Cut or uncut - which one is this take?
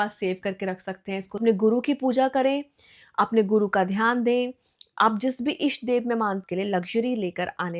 cut